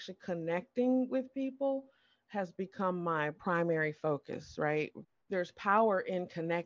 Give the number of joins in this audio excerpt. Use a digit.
2